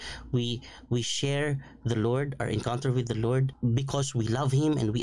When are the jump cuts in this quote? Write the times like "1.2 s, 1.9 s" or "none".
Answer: 3.5 s